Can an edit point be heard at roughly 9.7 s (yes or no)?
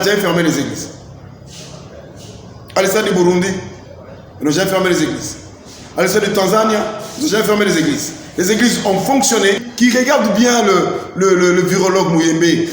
yes